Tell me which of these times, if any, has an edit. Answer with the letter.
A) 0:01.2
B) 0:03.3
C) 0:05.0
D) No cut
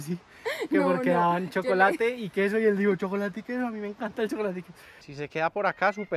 C